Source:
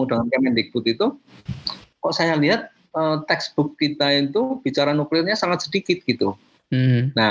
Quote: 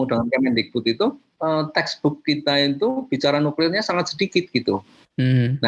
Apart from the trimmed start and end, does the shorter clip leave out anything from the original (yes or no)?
yes